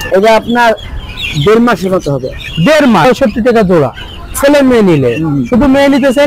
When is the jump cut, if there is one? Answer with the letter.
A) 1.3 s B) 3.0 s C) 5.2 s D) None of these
B